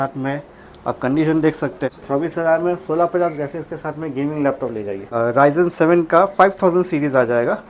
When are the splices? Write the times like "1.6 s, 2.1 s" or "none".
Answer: 1.9 s, 5.1 s